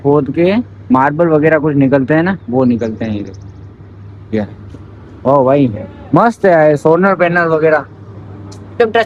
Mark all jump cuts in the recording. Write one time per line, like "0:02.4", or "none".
none